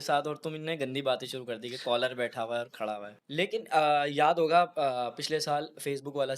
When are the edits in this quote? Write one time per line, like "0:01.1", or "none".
0:03.2